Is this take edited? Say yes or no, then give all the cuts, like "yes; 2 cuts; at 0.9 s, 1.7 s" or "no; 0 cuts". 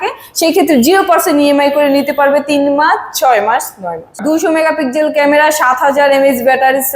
yes; 1 cut; at 4.2 s